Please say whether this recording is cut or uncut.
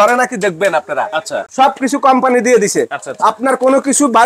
cut